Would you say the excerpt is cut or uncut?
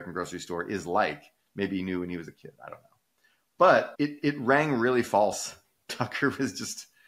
uncut